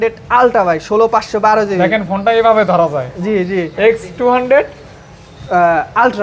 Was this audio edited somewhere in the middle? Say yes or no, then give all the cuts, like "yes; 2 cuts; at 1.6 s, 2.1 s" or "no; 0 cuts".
no; 0 cuts